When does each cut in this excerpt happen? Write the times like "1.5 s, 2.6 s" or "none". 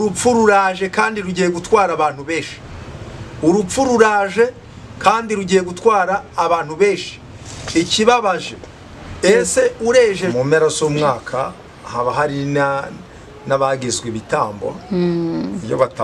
10.3 s